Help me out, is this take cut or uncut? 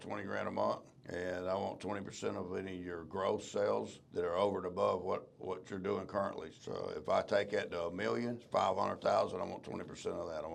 cut